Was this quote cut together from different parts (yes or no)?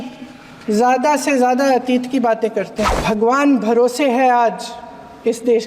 yes